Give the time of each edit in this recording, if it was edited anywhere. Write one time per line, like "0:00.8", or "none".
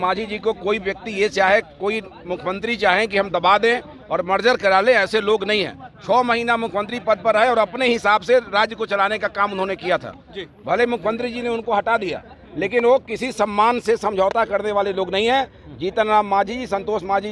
none